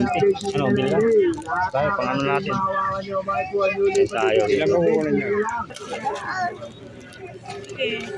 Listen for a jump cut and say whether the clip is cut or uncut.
cut